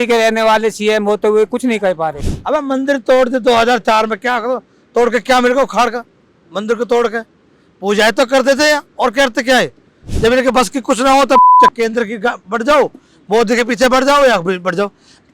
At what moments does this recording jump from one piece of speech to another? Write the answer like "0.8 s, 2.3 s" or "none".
2.2 s, 10.0 s